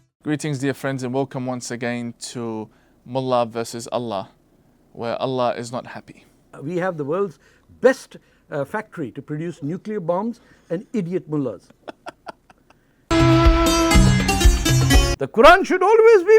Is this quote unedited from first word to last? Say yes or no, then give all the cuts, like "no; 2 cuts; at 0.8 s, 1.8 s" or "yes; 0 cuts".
no; 3 cuts; at 6.6 s, 13.1 s, 15.1 s